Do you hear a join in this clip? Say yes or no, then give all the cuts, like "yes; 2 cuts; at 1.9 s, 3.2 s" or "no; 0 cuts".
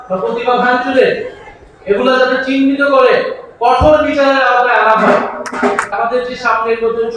yes; 1 cut; at 5.9 s